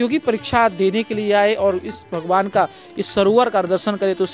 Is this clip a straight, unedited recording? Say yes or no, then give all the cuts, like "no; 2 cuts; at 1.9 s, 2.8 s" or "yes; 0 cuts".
yes; 0 cuts